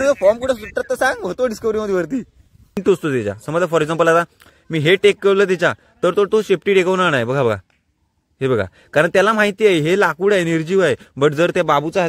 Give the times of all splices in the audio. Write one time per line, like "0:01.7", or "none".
0:02.8